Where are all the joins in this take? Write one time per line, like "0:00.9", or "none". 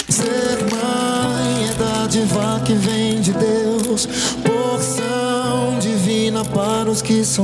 none